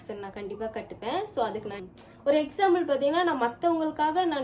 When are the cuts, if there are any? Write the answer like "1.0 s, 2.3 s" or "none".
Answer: 1.8 s